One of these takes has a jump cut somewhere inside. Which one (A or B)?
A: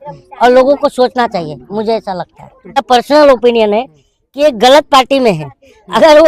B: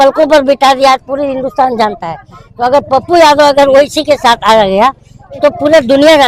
A